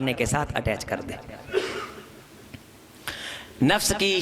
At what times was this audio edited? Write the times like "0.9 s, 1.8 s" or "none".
none